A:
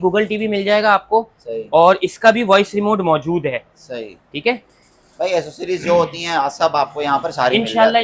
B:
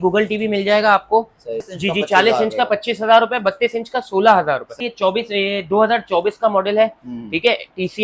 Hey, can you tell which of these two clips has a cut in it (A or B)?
B